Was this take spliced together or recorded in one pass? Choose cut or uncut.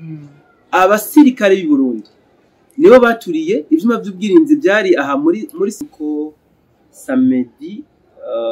cut